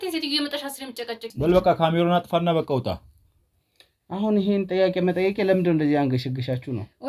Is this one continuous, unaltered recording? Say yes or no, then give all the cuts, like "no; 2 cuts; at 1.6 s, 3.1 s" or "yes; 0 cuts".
no; 1 cut; at 1.3 s